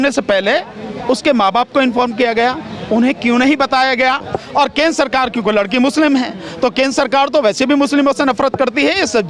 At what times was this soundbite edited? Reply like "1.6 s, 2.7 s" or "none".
4.3 s